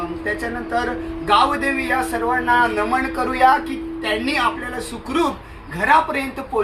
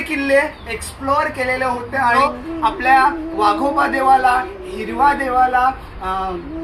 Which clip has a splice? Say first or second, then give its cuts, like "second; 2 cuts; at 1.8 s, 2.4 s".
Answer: second; 1 cut; at 2.1 s